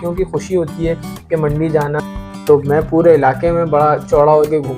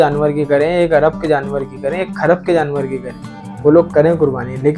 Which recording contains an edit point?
first; 1 cut; at 2.0 s

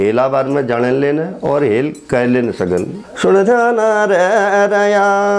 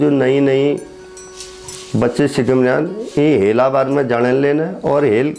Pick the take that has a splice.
first; 1 cut; at 3.0 s

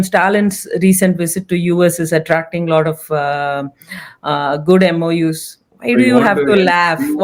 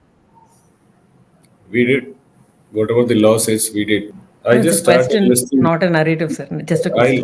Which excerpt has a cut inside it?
second; 1 cut; at 4.1 s

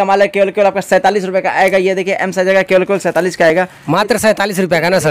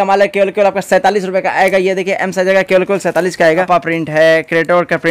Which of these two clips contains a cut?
second; 1 cut; at 3.5 s

